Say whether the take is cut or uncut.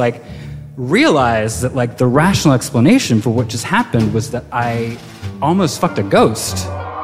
uncut